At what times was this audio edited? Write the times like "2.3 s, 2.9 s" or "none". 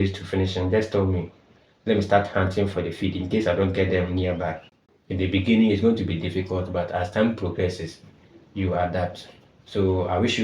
4.8 s